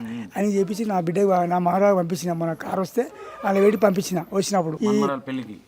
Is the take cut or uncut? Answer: cut